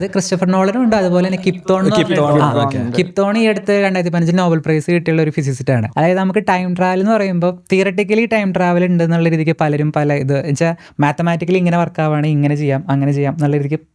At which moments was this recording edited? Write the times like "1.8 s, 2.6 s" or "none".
5.8 s